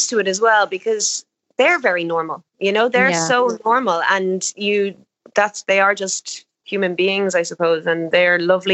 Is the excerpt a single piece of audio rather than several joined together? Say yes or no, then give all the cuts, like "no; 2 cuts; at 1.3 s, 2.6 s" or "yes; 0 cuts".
yes; 0 cuts